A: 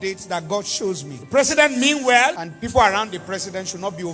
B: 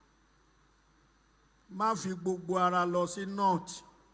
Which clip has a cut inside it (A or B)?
A